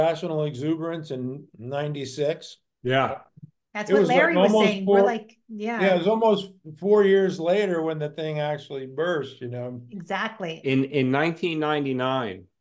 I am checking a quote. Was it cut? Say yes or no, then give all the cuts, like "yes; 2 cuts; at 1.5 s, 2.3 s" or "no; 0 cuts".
yes; 1 cut; at 10.6 s